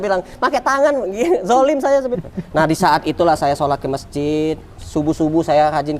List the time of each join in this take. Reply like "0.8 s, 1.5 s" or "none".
2.2 s